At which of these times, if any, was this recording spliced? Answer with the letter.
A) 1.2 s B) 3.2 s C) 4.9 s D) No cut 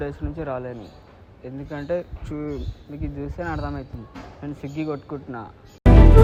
D